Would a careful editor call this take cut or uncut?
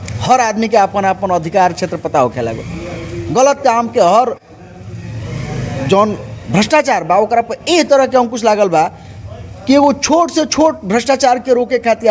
uncut